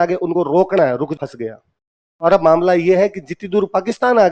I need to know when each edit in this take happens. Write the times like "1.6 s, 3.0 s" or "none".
1.1 s

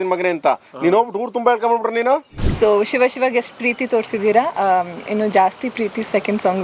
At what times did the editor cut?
2.4 s

